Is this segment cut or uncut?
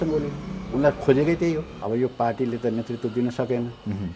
cut